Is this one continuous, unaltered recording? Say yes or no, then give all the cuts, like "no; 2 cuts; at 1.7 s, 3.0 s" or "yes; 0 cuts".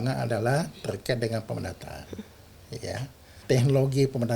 no; 1 cut; at 3.4 s